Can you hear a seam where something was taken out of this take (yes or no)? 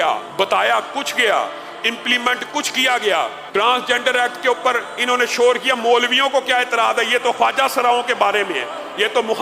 yes